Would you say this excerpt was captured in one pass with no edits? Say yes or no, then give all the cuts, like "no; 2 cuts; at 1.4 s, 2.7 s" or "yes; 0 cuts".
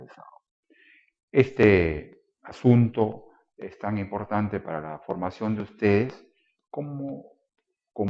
yes; 0 cuts